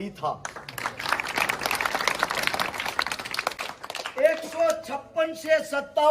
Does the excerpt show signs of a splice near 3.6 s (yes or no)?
yes